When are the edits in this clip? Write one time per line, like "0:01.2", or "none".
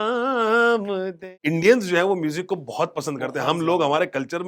0:01.3